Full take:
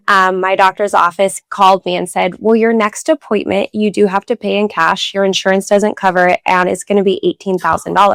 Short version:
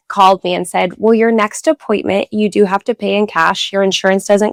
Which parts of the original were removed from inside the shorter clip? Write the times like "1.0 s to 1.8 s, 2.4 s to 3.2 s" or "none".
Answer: none